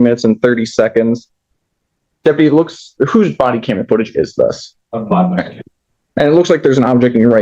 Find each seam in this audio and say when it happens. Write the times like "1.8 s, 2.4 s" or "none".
none